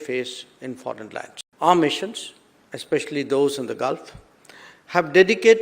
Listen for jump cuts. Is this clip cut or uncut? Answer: cut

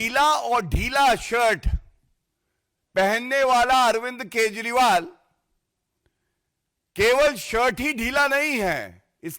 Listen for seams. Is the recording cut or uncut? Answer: uncut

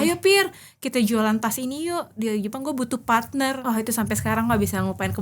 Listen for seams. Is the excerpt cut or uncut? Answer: cut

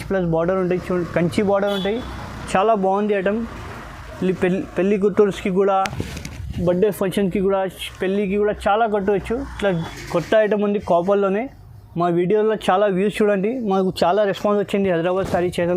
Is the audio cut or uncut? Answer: cut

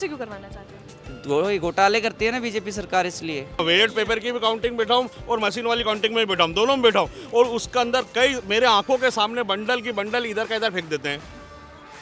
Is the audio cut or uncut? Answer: cut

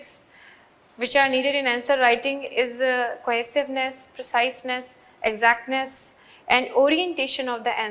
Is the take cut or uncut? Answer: uncut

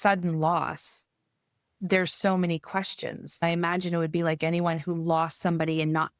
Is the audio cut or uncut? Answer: cut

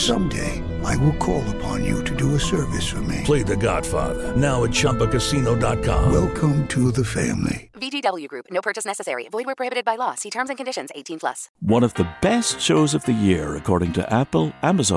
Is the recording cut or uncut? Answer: cut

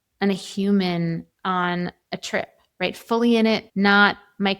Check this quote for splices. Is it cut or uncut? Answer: cut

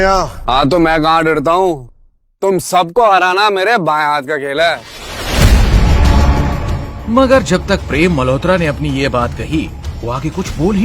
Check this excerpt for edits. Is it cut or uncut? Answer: cut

